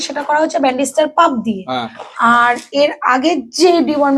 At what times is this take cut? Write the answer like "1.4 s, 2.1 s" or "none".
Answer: none